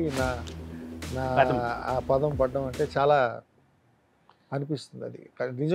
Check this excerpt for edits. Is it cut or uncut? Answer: uncut